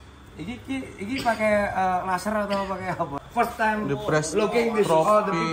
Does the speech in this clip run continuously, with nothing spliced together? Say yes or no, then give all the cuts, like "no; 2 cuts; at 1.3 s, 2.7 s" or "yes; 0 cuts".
no; 1 cut; at 3.2 s